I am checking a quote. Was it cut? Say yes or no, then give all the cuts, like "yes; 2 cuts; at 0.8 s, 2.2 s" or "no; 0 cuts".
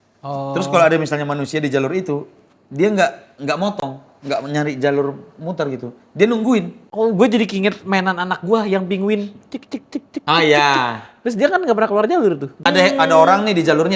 yes; 2 cuts; at 6.8 s, 12.7 s